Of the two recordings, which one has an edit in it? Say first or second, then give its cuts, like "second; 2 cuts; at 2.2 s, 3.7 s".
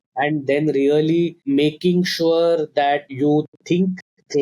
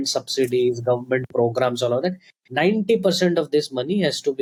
first; 2 cuts; at 1.4 s, 3.1 s